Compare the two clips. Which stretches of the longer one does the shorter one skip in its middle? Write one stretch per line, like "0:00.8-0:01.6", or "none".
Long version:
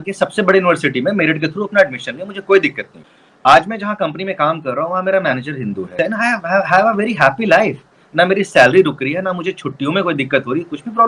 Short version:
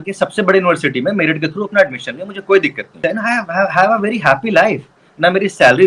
0:02.9-0:05.8